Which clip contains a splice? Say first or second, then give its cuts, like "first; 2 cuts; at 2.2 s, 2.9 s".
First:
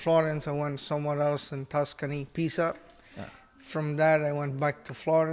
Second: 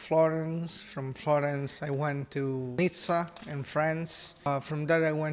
second; 2 cuts; at 2.8 s, 4.5 s